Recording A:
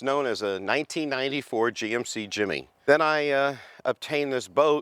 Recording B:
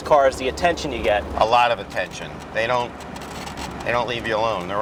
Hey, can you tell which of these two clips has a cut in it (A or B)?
A